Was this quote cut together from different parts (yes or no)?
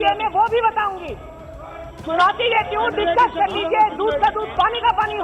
no